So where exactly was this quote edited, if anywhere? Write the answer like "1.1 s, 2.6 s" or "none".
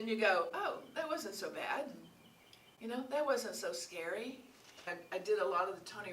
4.9 s